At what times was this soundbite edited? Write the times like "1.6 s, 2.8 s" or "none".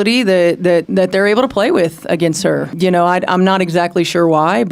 2.7 s